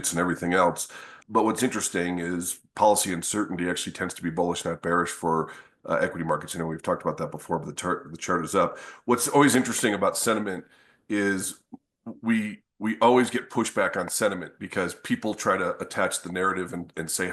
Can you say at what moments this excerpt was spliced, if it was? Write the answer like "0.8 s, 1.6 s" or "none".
1.1 s